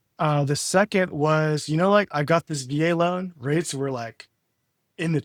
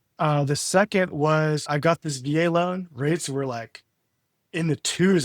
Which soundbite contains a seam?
second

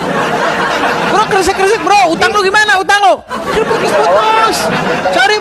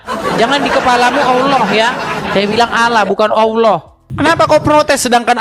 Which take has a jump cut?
second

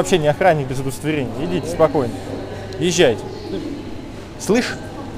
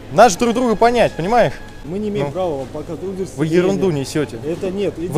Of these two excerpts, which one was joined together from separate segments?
second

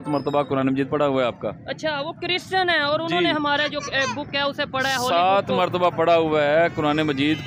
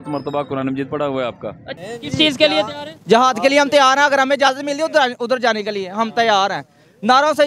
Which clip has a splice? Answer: second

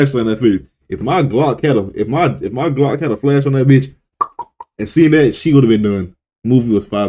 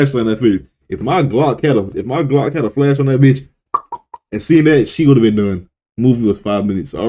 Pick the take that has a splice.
second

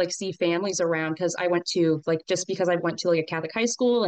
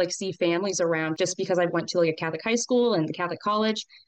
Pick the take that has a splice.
second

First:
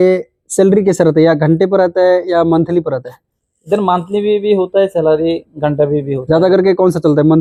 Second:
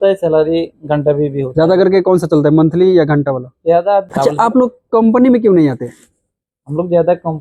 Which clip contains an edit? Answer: second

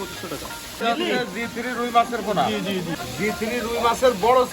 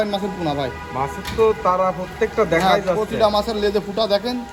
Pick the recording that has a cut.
first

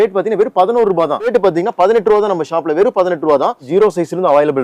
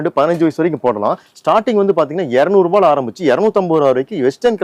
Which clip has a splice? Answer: first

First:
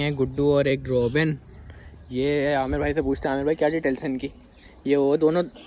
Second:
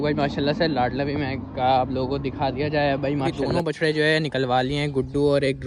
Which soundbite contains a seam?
second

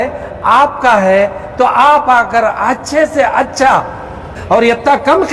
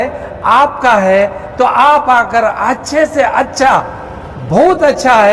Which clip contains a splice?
first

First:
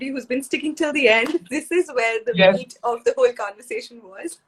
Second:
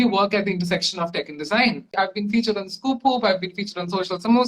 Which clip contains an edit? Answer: second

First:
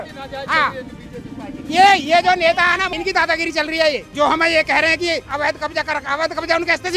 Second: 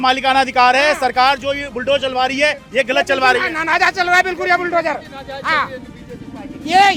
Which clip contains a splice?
first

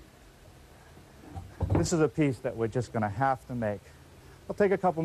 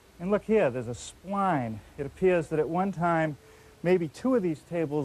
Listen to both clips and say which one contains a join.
second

